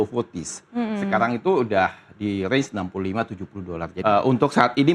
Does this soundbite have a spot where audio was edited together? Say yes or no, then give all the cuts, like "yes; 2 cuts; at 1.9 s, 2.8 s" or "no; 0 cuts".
yes; 1 cut; at 3.9 s